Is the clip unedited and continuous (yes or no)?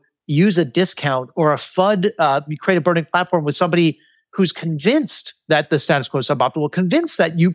no